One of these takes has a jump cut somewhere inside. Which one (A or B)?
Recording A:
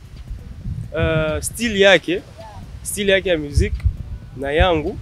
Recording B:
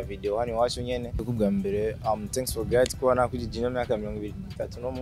B